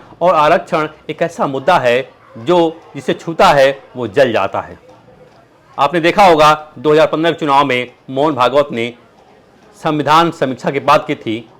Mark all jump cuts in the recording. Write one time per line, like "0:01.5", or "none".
none